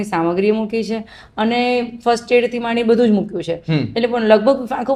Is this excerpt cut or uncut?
uncut